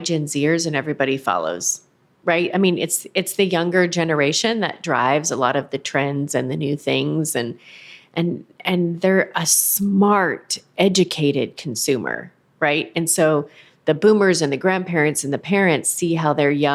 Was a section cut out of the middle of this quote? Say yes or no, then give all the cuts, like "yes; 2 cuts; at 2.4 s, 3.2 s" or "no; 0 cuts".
no; 0 cuts